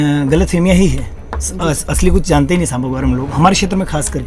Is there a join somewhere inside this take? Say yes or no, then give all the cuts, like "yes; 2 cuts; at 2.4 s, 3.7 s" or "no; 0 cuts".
no; 0 cuts